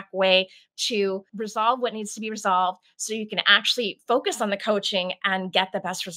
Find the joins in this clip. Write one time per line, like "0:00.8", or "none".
0:01.3